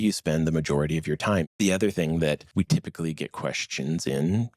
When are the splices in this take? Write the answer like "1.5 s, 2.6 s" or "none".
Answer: 1.5 s, 2.5 s